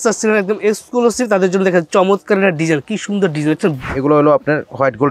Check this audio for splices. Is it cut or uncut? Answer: cut